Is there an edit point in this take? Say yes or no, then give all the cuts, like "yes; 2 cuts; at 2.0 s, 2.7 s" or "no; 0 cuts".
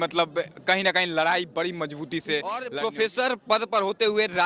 yes; 1 cut; at 2.7 s